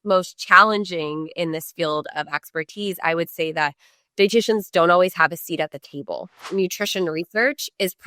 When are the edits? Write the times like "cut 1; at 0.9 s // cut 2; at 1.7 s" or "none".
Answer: cut 1; at 6.4 s